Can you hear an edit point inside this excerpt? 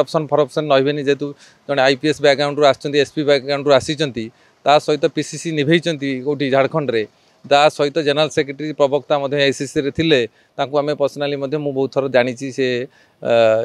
no; 0 cuts

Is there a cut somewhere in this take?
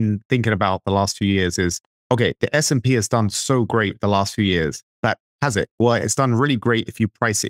yes; 2 cuts; at 1.9 s, 5.1 s

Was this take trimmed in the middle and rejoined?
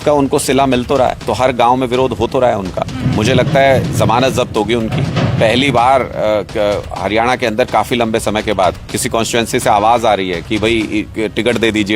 yes; 1 cut; at 1.2 s

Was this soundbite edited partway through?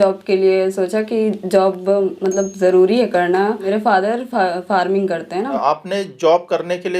yes; 2 cuts; at 3.7 s, 5.6 s

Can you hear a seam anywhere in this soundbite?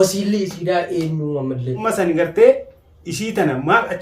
yes; 1 cut; at 1.8 s

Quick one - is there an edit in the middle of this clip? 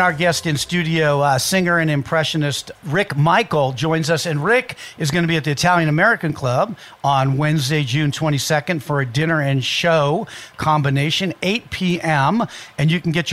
yes; 1 cut; at 2.7 s

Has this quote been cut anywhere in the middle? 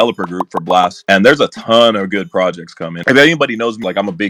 yes; 1 cut; at 3.0 s

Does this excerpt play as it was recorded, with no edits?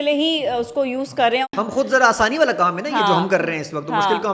no; 1 cut; at 1.5 s

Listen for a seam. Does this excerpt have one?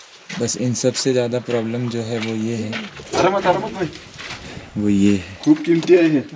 no; 0 cuts

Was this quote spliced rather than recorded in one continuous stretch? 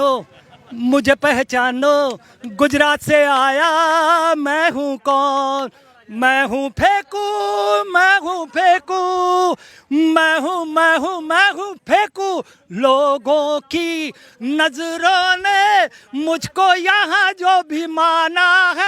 no; 0 cuts

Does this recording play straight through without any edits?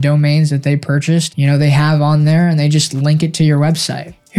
no; 1 cut; at 1.3 s

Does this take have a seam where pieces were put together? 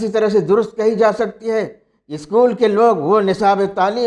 no; 0 cuts

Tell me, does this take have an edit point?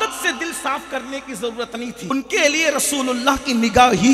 yes; 1 cut; at 2.1 s

